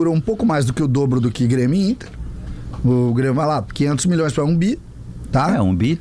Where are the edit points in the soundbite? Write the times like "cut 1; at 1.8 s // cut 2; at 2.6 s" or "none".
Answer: none